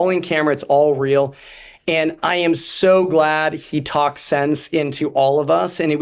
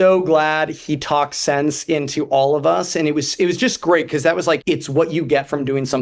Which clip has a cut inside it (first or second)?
second